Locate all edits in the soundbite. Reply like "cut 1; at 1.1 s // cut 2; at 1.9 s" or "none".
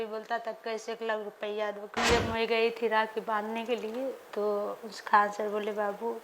cut 1; at 2.0 s